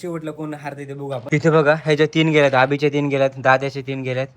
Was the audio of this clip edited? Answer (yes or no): yes